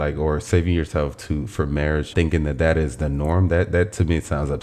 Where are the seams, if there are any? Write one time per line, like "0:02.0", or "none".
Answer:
0:02.1